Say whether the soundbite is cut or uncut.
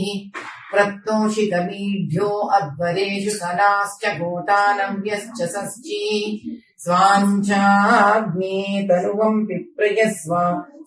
uncut